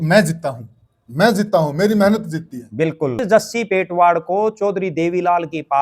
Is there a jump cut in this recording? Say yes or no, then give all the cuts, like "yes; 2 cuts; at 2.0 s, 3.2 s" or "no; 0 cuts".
yes; 1 cut; at 3.2 s